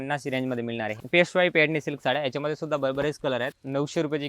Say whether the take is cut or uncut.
cut